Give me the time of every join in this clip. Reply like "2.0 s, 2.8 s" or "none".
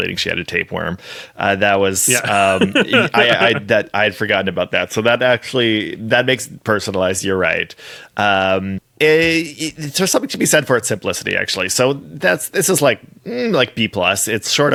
none